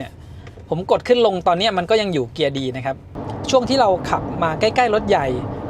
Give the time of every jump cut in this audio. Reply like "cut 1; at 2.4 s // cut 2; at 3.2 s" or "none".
cut 1; at 3.1 s